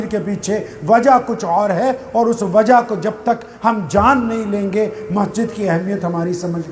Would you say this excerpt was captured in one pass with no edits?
yes; 0 cuts

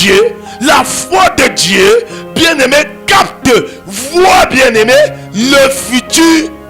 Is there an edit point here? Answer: no; 0 cuts

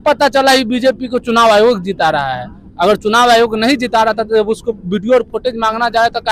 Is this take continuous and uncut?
yes; 0 cuts

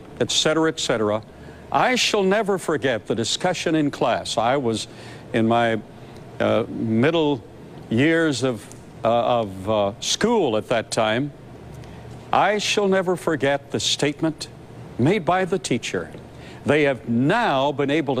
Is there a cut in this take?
no; 0 cuts

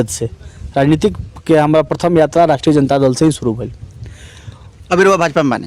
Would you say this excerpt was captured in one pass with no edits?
yes; 0 cuts

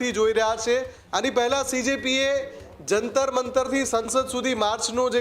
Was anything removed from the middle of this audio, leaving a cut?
yes; 1 cut; at 1.0 s

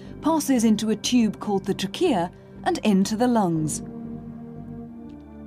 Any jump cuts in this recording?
yes; 1 cut; at 2.1 s

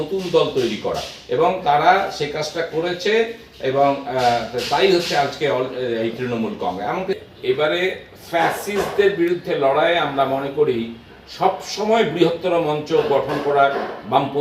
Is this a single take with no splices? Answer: no; 1 cut; at 7.2 s

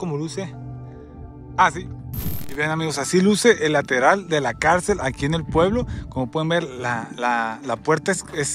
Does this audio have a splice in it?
yes; 1 cut; at 2.5 s

